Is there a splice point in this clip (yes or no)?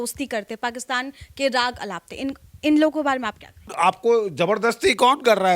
yes